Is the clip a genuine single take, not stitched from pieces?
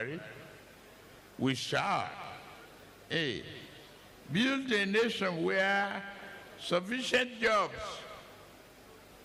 yes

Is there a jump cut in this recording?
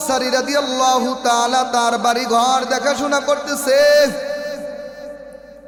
no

